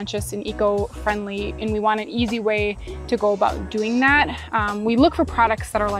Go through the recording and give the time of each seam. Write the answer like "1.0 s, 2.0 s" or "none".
1.5 s